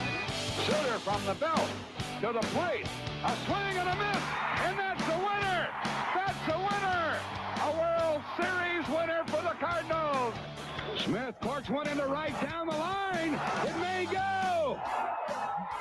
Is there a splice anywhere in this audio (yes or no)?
no